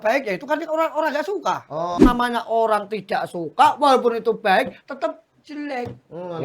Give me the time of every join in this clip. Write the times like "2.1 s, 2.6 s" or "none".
1.9 s